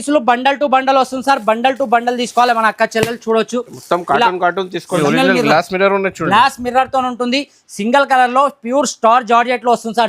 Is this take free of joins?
no; 1 cut; at 5.0 s

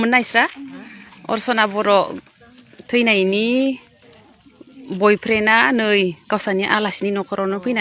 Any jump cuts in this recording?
no; 0 cuts

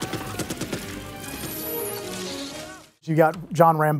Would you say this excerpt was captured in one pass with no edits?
no; 1 cut; at 3.1 s

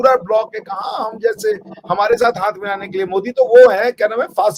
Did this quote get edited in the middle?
no; 0 cuts

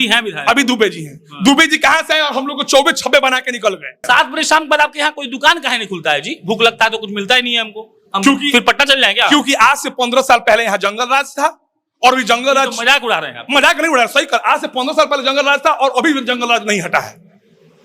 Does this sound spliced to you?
yes; 1 cut; at 4.0 s

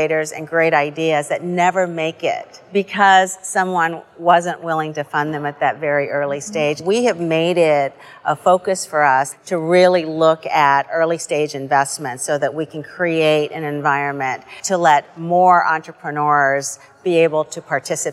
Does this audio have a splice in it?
yes; 4 cuts; at 2.6 s, 6.8 s, 9.4 s, 14.6 s

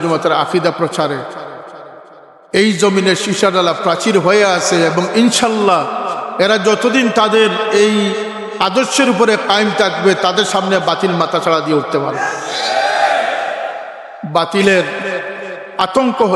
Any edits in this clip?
no; 0 cuts

